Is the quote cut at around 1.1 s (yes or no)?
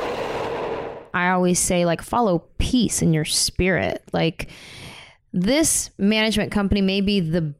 yes